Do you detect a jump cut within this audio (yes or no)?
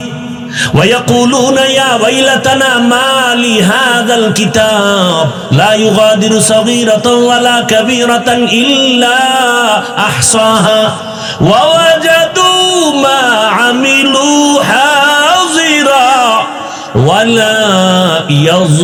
no